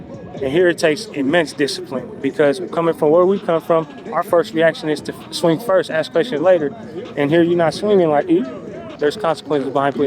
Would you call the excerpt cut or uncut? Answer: cut